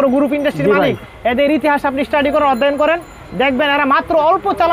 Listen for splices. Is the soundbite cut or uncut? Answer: uncut